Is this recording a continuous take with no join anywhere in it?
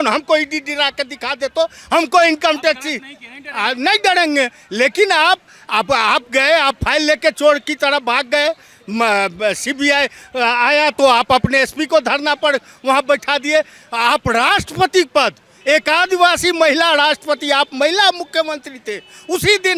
yes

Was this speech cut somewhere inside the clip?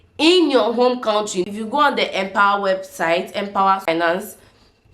yes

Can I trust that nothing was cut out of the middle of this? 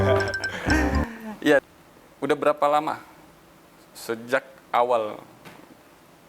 no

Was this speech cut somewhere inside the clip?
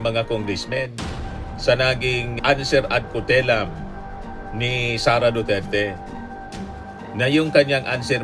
no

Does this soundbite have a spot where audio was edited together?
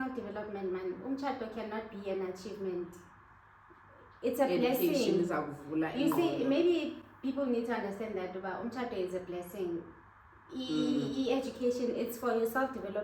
no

